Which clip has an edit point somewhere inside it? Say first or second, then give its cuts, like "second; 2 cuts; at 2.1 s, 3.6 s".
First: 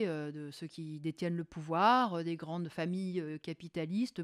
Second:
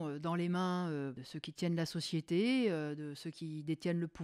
second; 1 cut; at 1.3 s